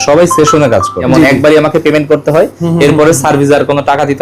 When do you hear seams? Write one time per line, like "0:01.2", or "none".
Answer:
0:01.0